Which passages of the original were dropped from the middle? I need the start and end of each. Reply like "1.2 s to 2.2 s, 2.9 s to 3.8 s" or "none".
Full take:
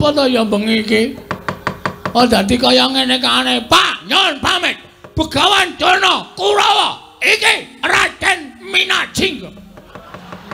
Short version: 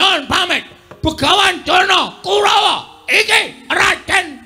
none